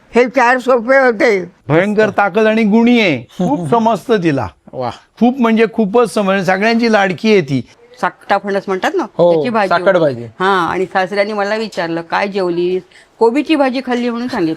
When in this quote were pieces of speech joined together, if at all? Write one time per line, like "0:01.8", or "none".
0:01.5
0:07.8